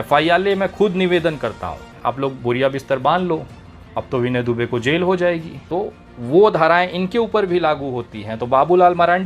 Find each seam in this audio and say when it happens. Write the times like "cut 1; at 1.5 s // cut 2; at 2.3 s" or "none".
cut 1; at 1.9 s // cut 2; at 5.5 s

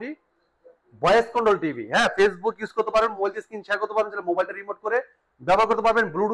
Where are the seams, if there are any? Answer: none

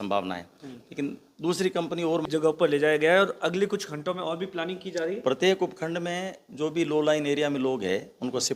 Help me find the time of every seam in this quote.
cut 1; at 2.3 s

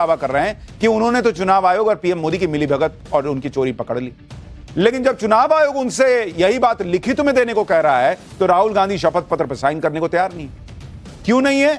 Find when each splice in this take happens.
none

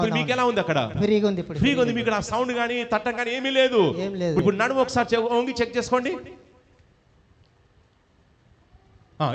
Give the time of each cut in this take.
cut 1; at 4.4 s

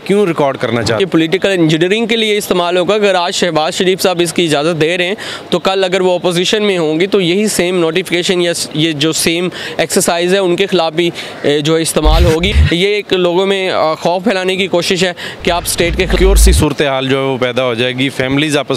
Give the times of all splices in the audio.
cut 1; at 1.0 s // cut 2; at 12.5 s // cut 3; at 16.1 s

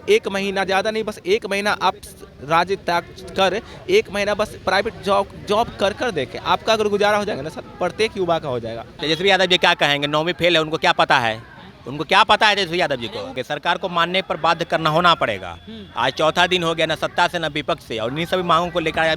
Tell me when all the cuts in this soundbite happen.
cut 1; at 8.9 s // cut 2; at 13.3 s

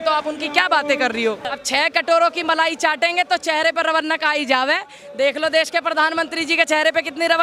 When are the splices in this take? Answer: cut 1; at 1.5 s

